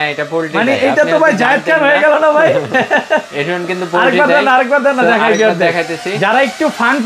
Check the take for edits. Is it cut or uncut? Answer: uncut